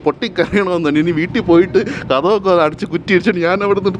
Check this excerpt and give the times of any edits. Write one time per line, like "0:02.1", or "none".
none